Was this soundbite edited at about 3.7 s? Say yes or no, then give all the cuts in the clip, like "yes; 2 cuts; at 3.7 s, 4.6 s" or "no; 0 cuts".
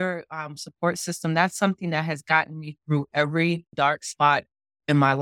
yes; 1 cut; at 3.7 s